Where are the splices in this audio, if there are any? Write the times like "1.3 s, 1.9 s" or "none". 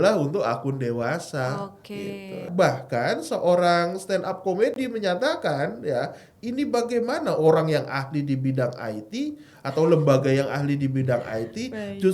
2.5 s